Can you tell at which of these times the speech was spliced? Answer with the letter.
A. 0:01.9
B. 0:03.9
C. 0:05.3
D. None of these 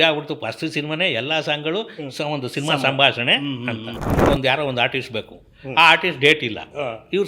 B